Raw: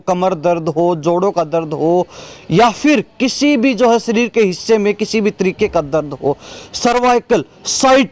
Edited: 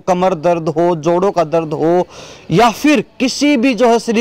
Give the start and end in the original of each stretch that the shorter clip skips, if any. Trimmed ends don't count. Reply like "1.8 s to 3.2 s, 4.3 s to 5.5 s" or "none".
none